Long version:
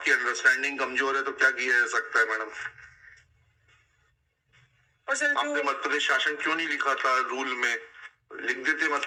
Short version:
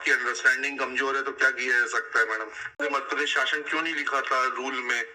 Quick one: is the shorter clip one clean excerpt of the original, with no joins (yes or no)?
no